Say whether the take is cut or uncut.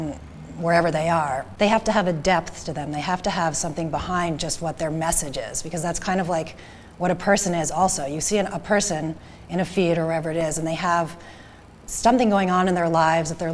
cut